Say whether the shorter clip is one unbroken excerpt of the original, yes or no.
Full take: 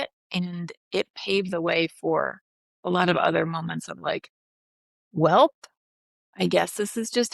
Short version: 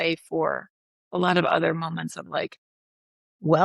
yes